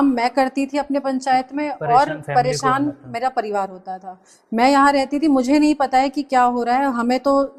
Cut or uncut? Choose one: uncut